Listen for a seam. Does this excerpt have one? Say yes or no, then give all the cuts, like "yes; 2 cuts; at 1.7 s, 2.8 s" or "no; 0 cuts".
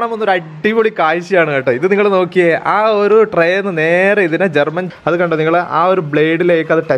yes; 1 cut; at 4.8 s